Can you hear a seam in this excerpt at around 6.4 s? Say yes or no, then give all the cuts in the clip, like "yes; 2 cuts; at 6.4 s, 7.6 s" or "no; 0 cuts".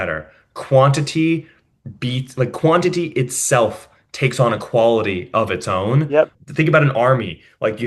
yes; 1 cut; at 6.4 s